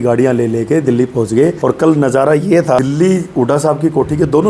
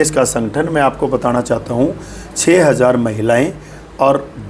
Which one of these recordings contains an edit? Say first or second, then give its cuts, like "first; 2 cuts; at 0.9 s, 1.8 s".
first; 2 cuts; at 1.6 s, 2.8 s